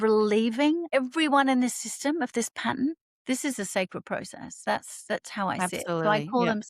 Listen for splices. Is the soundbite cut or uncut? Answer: cut